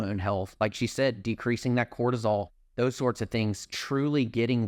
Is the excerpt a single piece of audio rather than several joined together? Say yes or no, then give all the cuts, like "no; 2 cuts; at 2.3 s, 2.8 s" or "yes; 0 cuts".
yes; 0 cuts